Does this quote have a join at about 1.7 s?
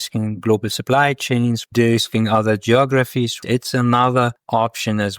yes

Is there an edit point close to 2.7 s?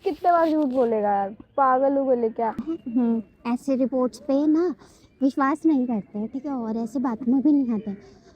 yes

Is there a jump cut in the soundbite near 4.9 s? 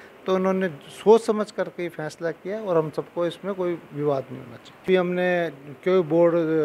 yes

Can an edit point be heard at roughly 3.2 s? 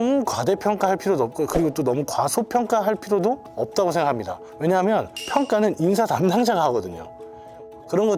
no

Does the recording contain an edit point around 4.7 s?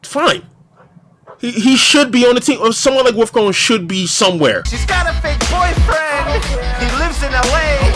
yes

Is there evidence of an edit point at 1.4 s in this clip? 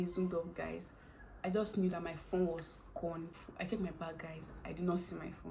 no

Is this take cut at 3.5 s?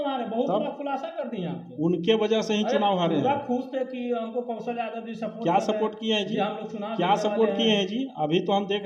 no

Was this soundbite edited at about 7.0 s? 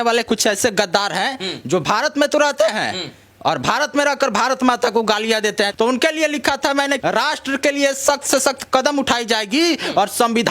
yes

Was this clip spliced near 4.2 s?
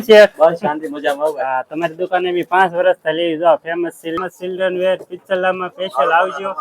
yes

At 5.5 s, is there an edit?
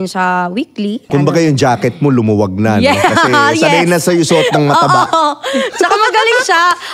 no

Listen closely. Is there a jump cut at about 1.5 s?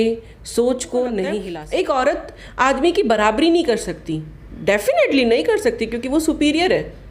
yes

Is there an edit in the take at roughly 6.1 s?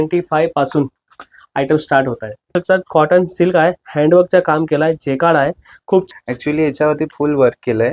yes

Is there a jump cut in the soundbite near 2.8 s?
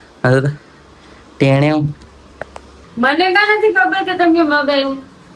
yes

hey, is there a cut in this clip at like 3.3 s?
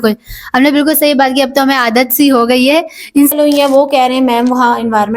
yes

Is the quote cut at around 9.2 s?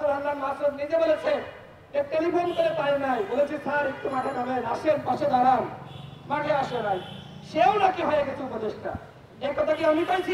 no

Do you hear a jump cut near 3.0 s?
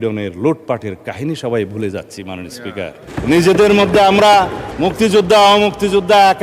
yes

